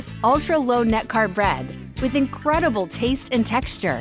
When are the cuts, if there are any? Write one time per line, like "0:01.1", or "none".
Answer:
none